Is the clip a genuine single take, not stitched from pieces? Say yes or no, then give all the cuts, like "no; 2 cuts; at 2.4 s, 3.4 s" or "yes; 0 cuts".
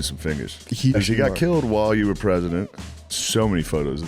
no; 2 cuts; at 1.0 s, 3.2 s